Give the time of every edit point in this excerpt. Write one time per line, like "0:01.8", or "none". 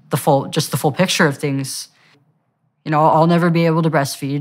0:02.2